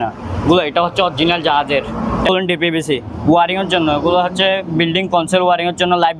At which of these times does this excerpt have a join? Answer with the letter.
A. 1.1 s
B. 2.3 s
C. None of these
B